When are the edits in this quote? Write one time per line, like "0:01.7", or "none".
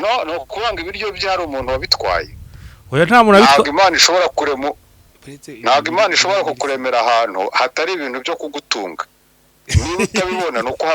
none